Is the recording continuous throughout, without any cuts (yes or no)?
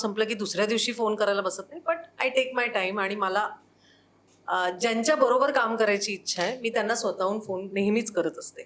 yes